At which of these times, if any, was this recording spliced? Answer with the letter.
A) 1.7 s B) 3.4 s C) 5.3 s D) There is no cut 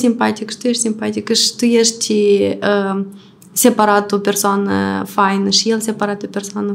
D